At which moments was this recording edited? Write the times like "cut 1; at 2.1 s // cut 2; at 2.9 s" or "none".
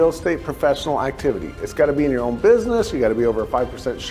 none